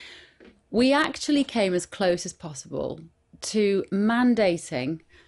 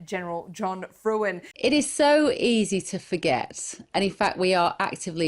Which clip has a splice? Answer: second; 1 cut; at 1.5 s

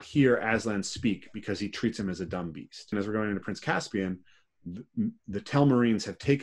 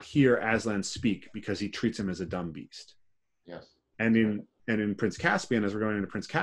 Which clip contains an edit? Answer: first; 1 cut; at 2.9 s

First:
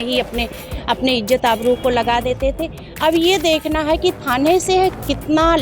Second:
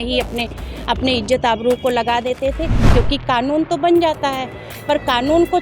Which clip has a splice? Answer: second; 1 cut; at 2.8 s

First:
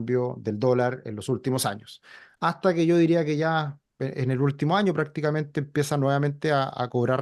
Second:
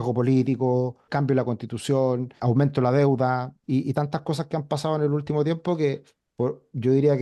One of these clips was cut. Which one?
second; 3 cuts; at 1.0 s, 2.3 s, 3.5 s

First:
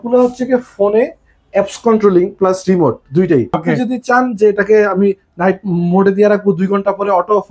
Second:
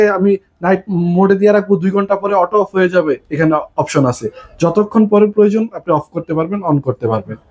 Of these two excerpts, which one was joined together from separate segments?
first; 1 cut; at 3.6 s

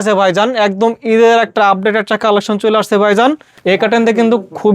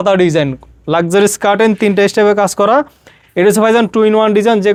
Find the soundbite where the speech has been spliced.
first; 1 cut; at 3.5 s

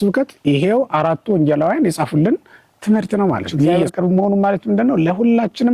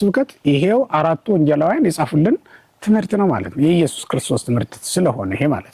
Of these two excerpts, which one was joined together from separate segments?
first; 1 cut; at 3.9 s

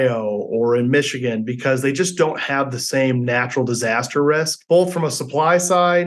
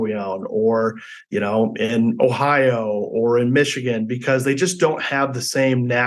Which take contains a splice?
first; 1 cut; at 4.6 s

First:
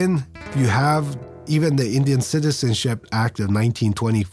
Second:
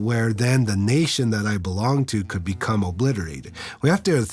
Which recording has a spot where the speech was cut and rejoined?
first; 1 cut; at 1.4 s

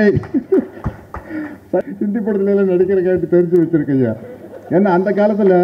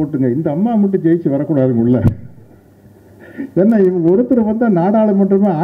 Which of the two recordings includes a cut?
first; 1 cut; at 1.9 s

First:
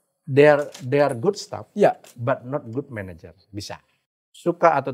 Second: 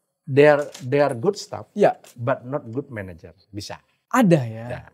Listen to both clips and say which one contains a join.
first; 1 cut; at 3.9 s

